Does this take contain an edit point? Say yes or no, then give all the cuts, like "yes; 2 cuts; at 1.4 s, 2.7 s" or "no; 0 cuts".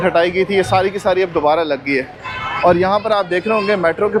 no; 0 cuts